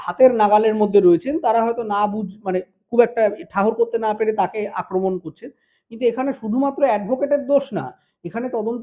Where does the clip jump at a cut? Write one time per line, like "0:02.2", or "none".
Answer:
none